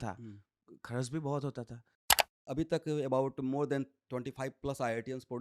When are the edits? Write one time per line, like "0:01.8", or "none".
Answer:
0:02.3